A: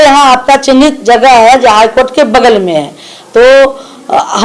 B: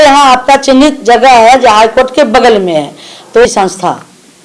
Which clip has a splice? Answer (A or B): B